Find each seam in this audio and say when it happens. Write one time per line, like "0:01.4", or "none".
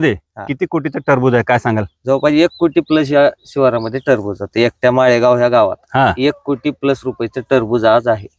none